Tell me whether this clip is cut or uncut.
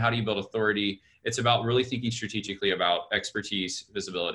uncut